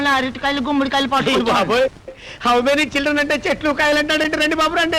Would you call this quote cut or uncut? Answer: uncut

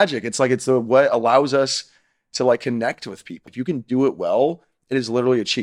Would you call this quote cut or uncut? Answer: cut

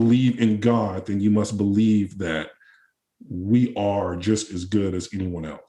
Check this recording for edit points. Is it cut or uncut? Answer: uncut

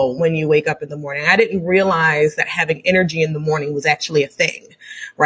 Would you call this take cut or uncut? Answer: uncut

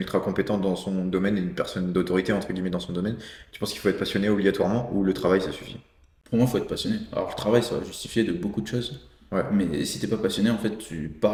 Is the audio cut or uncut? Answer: uncut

